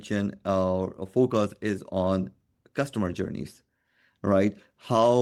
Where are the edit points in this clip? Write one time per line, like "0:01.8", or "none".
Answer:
none

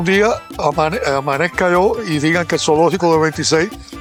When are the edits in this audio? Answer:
none

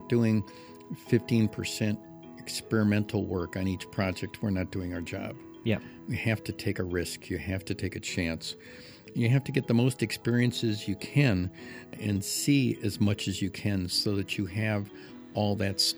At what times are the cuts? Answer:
0:09.1
0:11.9

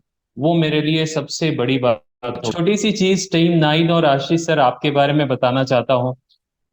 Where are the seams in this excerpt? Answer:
0:02.4

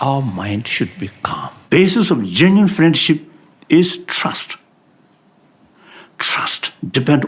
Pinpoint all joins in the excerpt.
0:01.6

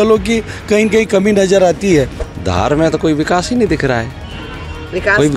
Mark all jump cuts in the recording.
0:02.2

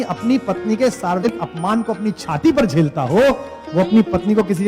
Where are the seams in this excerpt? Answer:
0:01.3

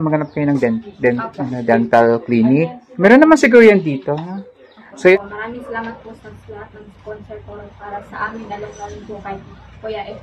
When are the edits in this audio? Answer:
0:05.2

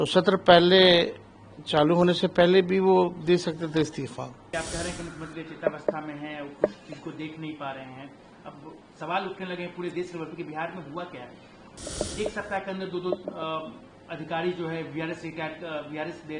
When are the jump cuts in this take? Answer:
0:04.4

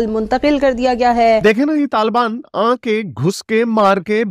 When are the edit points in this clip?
0:01.4

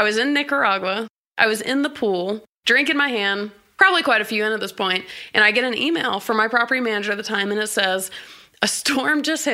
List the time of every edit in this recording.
0:01.1
0:02.5
0:03.6

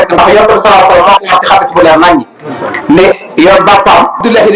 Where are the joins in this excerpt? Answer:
none

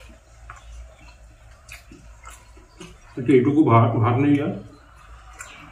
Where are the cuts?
none

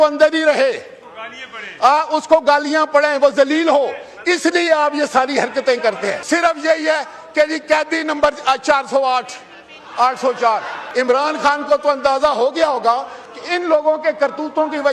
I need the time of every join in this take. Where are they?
0:06.2
0:10.8

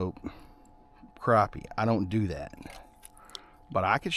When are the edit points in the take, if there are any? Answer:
none

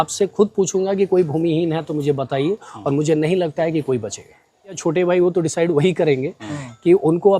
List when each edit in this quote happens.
0:04.8

